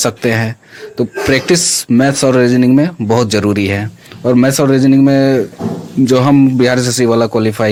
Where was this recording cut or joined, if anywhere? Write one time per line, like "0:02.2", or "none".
none